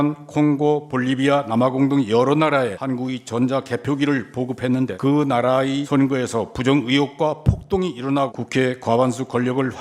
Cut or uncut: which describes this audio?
cut